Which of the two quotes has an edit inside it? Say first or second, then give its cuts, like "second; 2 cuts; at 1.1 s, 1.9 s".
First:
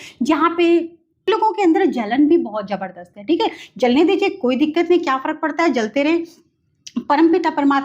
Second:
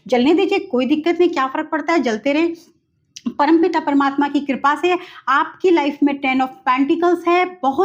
first; 1 cut; at 1.3 s